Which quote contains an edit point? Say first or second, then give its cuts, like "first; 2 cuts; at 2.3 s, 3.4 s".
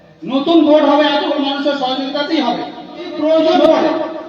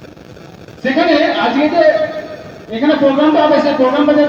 first; 1 cut; at 3.1 s